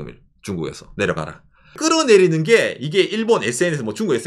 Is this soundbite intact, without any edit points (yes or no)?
no